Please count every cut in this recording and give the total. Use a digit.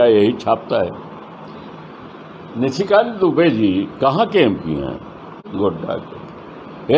0